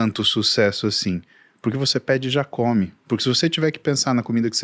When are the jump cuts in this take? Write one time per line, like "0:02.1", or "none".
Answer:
none